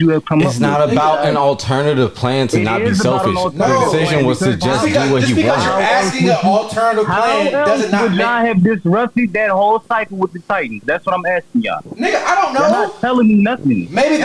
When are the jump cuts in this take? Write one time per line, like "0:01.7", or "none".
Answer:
none